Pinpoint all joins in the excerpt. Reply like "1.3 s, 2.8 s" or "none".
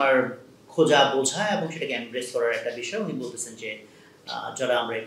none